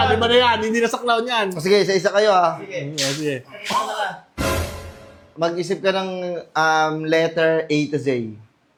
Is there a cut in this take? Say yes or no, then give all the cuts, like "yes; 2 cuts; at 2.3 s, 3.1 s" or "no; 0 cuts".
no; 0 cuts